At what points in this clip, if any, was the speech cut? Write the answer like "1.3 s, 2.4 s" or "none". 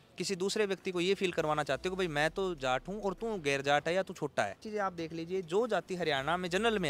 4.6 s